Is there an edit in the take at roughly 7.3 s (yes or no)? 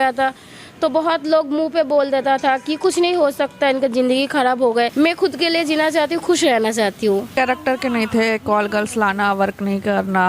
yes